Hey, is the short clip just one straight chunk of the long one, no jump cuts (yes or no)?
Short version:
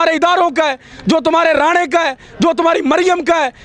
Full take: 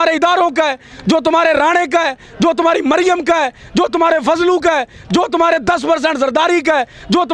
yes